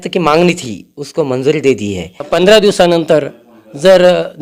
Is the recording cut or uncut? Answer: cut